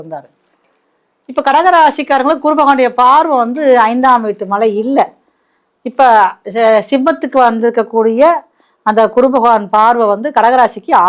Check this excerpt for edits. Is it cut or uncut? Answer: uncut